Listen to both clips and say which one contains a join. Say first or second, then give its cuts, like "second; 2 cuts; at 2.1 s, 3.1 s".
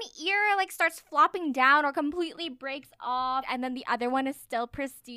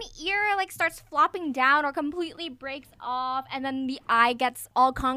first; 1 cut; at 3.5 s